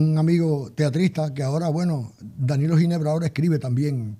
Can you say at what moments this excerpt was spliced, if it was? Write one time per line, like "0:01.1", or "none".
none